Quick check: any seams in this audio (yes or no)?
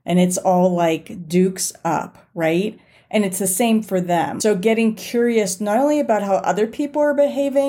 yes